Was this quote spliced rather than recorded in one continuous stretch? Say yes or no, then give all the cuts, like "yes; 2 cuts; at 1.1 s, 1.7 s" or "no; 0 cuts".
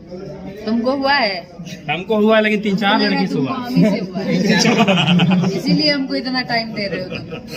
no; 0 cuts